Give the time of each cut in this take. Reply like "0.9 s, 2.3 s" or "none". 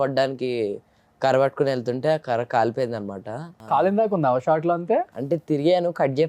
3.5 s, 5.2 s